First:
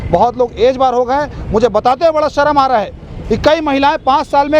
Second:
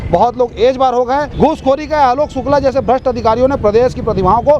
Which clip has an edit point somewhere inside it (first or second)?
second